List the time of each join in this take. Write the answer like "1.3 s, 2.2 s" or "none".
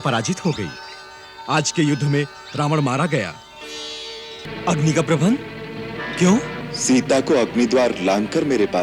4.5 s, 6.6 s

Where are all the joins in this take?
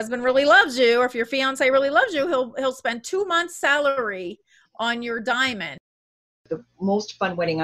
6.2 s

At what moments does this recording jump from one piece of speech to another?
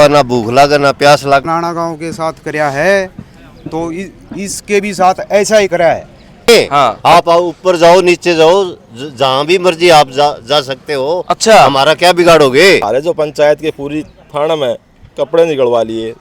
1.4 s, 6.5 s, 12.9 s

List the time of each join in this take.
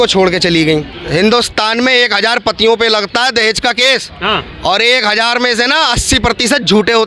1.0 s

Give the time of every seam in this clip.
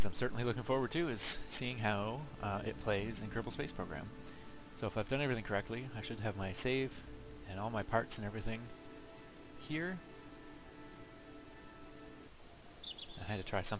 10.8 s

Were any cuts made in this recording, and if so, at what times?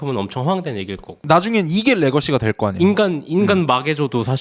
1.2 s

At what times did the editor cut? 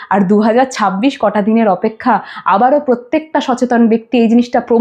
none

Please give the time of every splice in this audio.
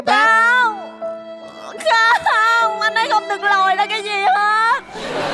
none

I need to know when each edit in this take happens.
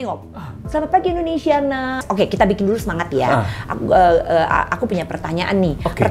2.0 s

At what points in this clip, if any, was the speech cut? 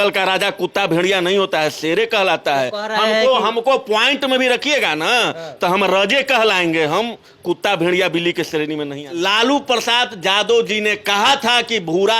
9.0 s

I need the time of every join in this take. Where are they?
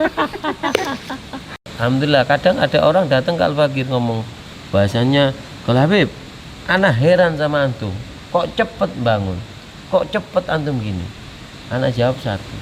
1.7 s

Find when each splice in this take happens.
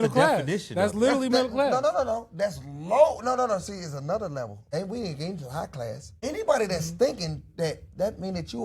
4.6 s, 6.1 s

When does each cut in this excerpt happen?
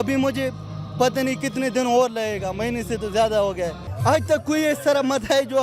3.9 s

